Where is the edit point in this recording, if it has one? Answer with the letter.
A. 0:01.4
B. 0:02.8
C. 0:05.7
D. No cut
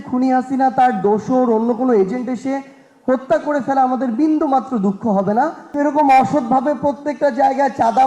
C